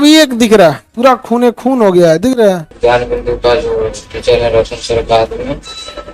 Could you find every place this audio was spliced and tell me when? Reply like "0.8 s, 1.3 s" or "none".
0.9 s, 2.7 s